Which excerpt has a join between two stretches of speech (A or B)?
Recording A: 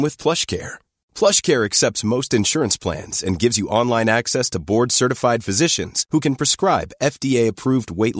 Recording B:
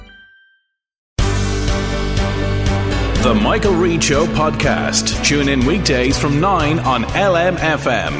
B